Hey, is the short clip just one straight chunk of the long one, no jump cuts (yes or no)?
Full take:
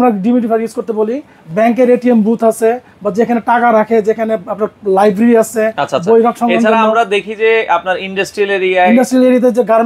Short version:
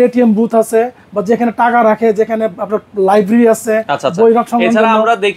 yes